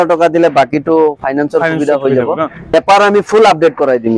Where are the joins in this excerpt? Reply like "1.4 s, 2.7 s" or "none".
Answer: 2.7 s